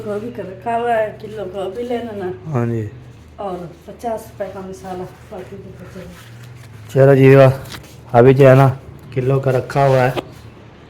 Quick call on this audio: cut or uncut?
uncut